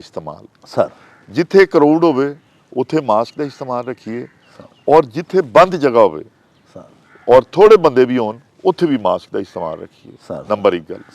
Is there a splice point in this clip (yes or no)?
no